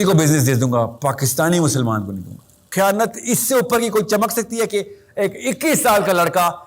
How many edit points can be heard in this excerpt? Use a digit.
1